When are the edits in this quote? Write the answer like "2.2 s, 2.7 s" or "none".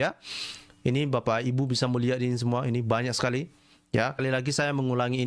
4.2 s